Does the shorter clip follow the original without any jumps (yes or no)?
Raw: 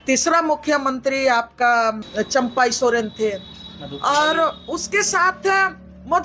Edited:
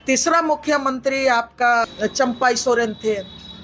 no